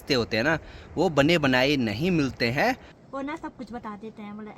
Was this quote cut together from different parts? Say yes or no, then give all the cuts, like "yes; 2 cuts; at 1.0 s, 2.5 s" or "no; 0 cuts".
yes; 1 cut; at 2.9 s